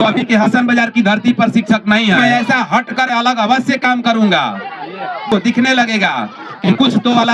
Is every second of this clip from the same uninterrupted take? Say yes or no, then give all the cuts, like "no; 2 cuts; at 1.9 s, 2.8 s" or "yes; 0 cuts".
no; 2 cuts; at 2.2 s, 5.3 s